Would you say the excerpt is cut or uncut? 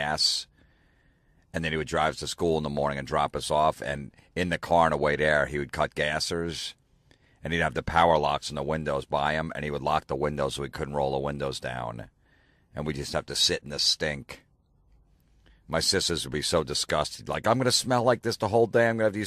cut